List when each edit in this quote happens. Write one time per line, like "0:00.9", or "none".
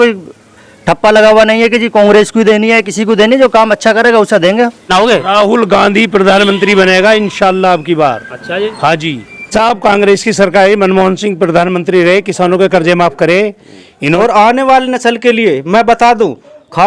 0:04.9
0:09.5
0:14.2